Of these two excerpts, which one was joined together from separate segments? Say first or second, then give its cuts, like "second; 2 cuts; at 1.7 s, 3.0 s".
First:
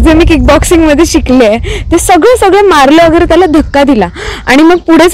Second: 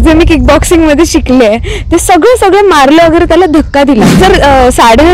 second; 1 cut; at 4.2 s